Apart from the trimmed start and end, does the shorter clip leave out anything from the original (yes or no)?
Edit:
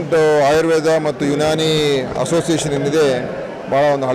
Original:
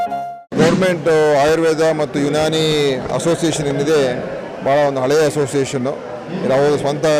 no